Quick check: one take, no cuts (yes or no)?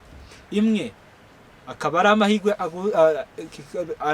yes